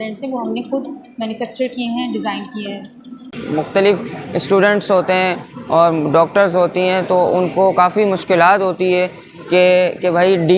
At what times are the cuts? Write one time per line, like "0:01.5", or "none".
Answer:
0:03.3

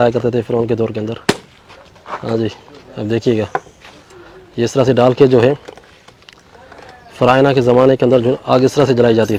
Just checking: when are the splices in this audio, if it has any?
none

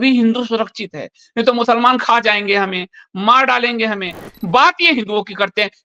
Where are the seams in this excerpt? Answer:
0:04.3

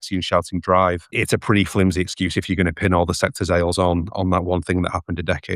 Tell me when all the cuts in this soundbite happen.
0:01.1

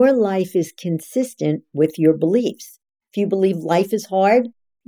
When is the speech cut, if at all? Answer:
0:03.0

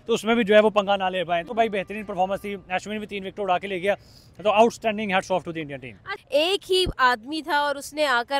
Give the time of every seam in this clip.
none

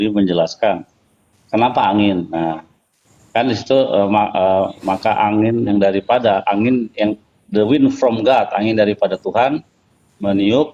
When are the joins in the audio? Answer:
none

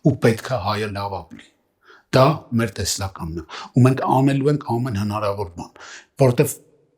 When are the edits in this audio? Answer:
none

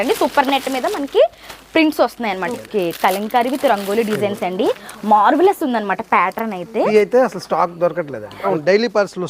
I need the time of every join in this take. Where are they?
0:02.5
0:06.9
0:08.4

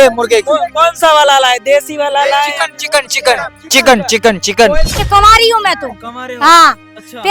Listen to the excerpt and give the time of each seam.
0:05.0

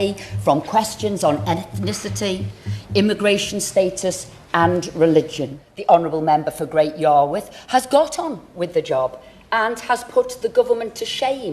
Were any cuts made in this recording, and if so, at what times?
0:05.7

